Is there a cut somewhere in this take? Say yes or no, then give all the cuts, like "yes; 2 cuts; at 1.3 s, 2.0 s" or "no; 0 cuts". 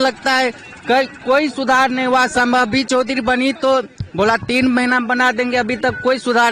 no; 0 cuts